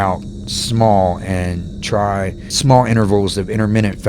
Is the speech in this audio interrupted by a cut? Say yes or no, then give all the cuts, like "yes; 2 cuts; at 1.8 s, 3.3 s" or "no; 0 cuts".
yes; 1 cut; at 2.5 s